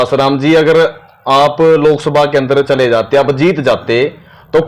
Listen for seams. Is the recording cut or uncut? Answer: uncut